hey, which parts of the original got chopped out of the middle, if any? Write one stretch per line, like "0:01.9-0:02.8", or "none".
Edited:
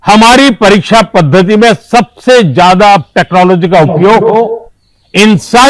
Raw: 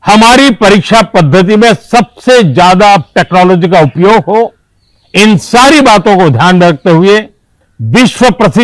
none